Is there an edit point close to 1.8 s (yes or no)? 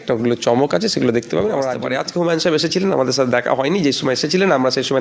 yes